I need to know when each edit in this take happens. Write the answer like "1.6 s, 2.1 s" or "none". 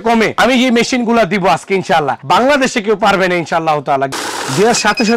4.1 s